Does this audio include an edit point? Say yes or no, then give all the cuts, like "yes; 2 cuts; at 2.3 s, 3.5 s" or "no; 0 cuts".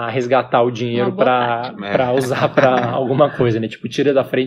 no; 0 cuts